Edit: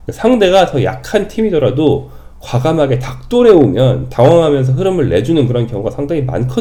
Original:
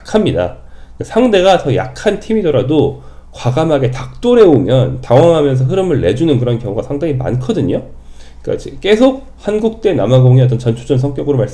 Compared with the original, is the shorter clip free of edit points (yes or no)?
yes